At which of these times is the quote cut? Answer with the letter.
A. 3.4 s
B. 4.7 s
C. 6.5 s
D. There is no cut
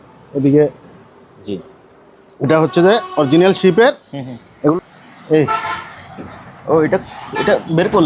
B